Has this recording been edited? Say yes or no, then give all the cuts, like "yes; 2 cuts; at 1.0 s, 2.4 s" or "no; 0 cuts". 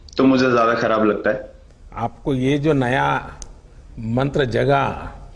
yes; 1 cut; at 1.7 s